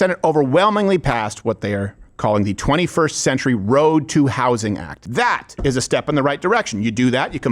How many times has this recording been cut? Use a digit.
1